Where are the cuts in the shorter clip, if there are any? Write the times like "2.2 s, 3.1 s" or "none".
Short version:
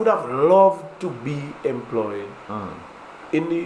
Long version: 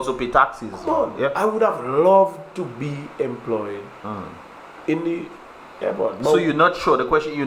none